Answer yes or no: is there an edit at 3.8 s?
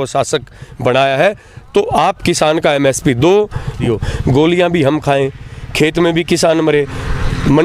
yes